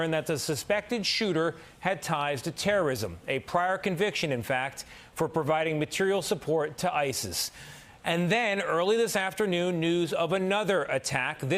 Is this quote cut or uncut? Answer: uncut